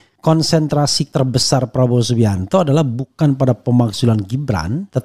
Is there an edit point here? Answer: yes; 1 cut; at 1.0 s

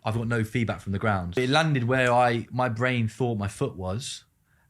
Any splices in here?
yes; 1 cut; at 1.4 s

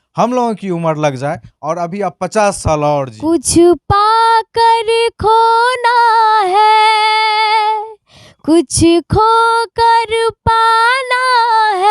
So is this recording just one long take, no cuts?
no; 1 cut; at 3.1 s

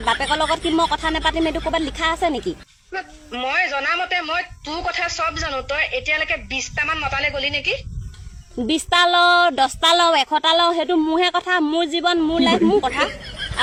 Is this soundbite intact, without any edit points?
yes; 0 cuts

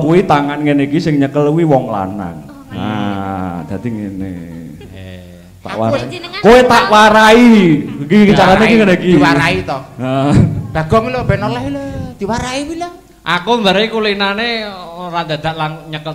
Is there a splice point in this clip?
no; 0 cuts

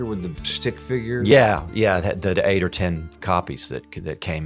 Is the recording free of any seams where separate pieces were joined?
no; 1 cut; at 1.3 s

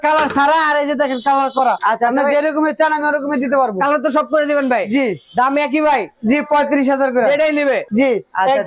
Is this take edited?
no; 0 cuts

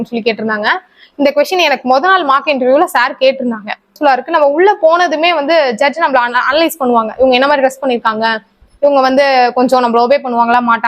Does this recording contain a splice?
yes; 1 cut; at 3.9 s

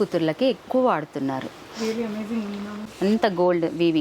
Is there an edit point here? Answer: yes; 1 cut; at 2.9 s

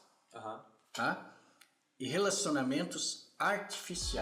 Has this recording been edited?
no; 0 cuts

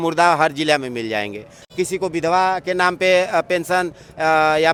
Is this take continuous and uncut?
yes; 0 cuts

